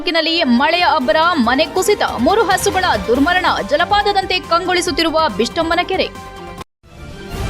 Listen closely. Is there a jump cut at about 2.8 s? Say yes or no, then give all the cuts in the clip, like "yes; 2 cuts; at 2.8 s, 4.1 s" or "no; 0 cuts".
no; 1 cut; at 6.5 s